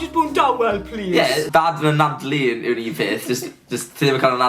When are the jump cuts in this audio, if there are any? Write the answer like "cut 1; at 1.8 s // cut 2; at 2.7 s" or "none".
cut 1; at 1.5 s